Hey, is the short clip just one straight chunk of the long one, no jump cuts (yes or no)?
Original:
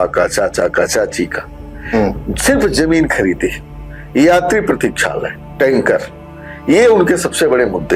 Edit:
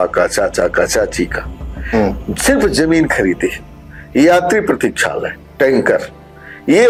yes